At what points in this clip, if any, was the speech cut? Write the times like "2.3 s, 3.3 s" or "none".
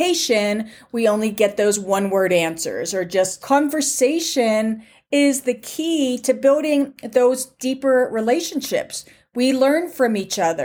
3.4 s